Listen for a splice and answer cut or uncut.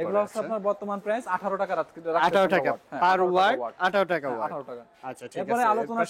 uncut